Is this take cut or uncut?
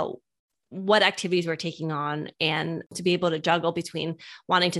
cut